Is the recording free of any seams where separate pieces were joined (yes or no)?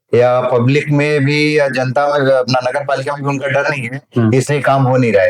yes